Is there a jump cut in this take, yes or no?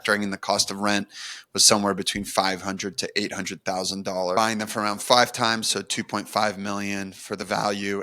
yes